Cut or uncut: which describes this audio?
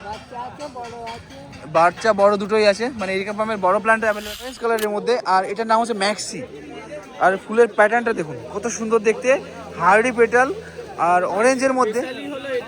cut